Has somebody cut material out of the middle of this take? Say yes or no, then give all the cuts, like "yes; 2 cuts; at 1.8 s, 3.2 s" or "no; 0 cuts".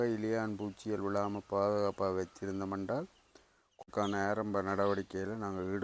yes; 1 cut; at 3.9 s